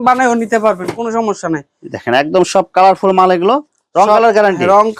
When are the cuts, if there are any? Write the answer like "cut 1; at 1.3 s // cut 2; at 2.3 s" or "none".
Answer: none